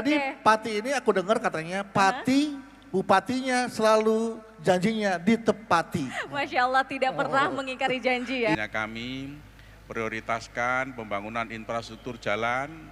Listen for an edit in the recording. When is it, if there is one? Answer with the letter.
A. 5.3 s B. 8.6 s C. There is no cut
B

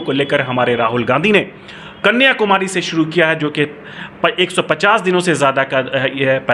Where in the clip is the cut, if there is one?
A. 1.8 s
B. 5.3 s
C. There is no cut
C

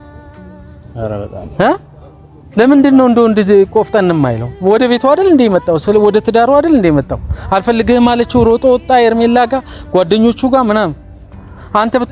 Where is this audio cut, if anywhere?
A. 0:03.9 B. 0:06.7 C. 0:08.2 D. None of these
D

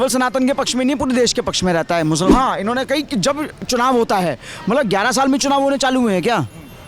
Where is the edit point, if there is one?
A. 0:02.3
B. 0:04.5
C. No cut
A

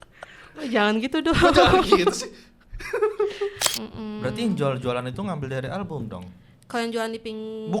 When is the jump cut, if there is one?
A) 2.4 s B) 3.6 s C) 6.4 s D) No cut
B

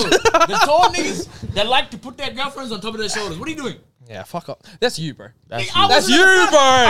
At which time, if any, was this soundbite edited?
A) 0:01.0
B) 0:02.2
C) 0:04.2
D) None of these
D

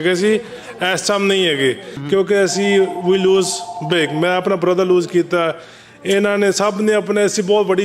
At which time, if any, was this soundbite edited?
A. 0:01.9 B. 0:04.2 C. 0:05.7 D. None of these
A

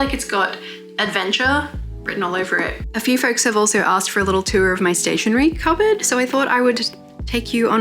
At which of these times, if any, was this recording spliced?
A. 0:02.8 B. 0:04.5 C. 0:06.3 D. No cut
A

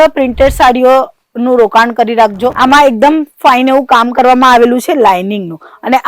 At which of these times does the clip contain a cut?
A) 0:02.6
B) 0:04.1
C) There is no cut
A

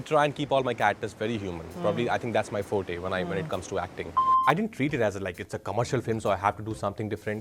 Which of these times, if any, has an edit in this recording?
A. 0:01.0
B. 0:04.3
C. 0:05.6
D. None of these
B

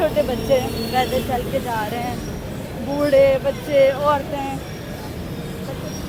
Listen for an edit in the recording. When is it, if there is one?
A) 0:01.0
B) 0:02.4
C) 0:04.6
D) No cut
D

